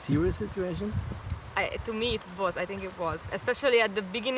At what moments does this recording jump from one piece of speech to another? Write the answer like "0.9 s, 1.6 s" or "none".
none